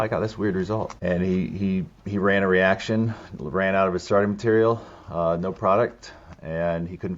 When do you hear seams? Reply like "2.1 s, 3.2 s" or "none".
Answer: 0.9 s

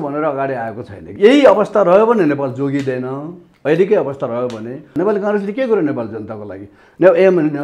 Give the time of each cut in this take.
1.0 s, 4.9 s

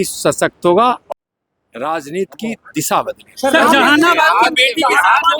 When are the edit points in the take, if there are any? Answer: 1.0 s

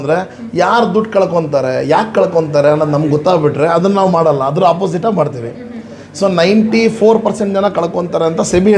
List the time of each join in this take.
none

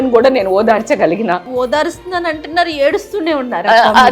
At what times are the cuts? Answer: 1.5 s

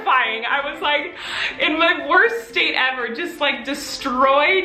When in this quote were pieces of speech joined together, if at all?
none

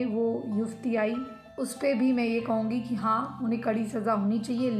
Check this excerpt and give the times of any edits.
none

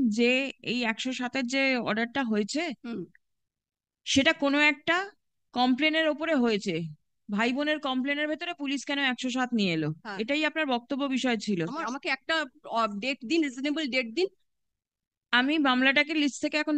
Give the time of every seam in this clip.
11.8 s

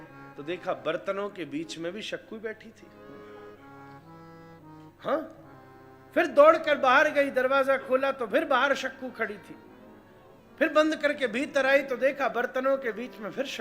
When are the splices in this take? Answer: none

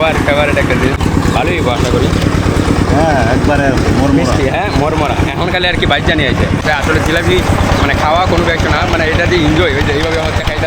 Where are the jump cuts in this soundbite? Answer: 1.0 s, 6.6 s

